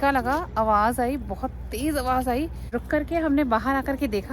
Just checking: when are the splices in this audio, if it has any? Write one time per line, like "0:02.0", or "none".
0:02.7